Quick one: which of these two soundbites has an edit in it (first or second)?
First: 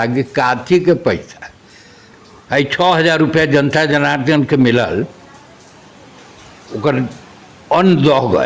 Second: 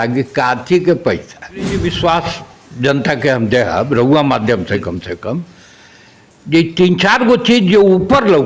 second